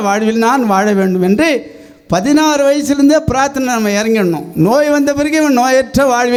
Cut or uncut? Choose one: uncut